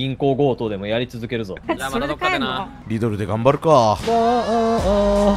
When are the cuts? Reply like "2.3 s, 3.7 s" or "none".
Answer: 1.6 s, 2.7 s